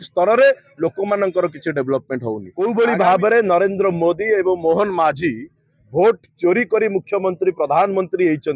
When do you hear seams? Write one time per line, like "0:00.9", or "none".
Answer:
0:02.5